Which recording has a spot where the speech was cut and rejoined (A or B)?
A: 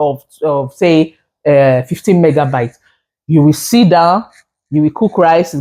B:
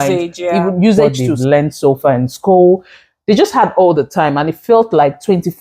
B